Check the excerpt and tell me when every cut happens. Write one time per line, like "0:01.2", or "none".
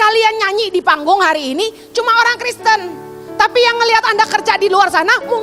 none